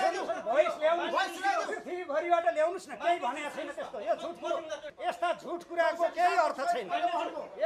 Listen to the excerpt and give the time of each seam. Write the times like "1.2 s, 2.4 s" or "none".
4.9 s